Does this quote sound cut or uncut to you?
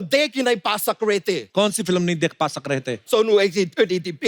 cut